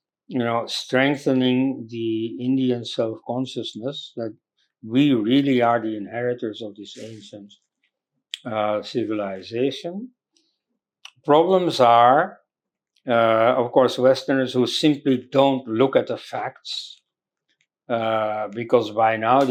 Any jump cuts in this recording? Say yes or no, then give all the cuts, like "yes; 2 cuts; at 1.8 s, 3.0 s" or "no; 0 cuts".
no; 0 cuts